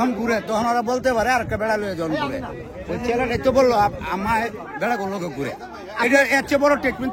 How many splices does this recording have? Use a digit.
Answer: 0